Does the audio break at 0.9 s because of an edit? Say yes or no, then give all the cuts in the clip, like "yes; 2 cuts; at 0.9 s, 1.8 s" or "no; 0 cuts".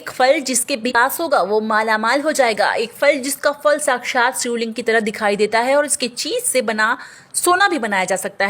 yes; 1 cut; at 0.9 s